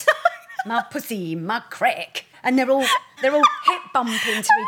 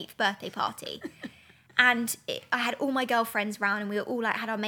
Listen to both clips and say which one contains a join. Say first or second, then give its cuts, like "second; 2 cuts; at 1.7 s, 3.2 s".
first; 2 cuts; at 2.3 s, 3.1 s